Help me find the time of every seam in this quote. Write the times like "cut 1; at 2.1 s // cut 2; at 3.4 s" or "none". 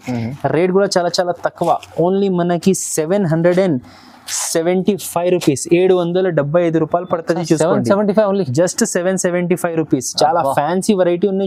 none